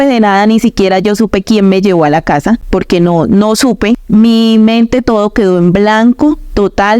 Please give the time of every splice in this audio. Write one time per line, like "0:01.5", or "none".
0:02.6
0:04.0